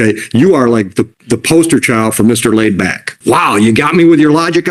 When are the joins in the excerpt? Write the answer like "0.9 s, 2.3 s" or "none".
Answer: 3.1 s